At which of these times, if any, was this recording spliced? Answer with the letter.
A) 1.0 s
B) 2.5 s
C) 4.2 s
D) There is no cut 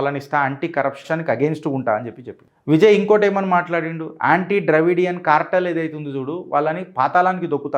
A